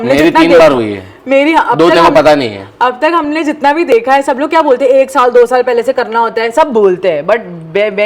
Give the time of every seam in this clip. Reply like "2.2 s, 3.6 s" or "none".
none